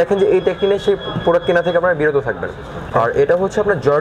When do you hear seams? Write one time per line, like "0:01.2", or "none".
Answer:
0:02.9